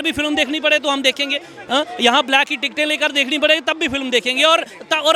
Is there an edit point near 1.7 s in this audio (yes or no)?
no